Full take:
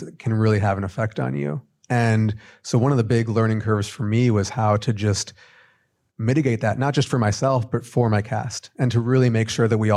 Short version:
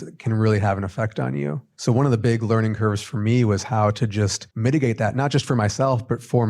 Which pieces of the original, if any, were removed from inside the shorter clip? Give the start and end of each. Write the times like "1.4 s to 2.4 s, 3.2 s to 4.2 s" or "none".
1.7 s to 2.5 s, 5.3 s to 6.1 s